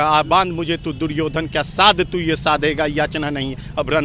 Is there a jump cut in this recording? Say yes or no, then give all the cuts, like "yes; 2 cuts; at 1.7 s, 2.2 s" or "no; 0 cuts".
no; 0 cuts